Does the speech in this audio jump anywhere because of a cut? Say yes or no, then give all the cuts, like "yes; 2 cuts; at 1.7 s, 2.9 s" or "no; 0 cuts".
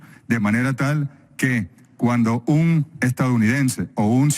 yes; 1 cut; at 3.3 s